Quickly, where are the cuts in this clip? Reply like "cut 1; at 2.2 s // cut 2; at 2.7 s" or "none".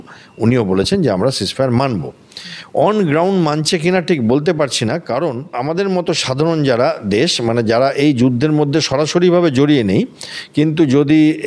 cut 1; at 5.5 s